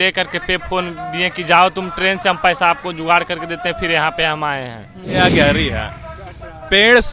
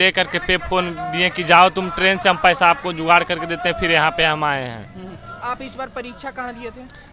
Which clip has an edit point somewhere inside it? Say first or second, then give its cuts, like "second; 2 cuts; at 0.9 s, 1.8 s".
first; 1 cut; at 5.1 s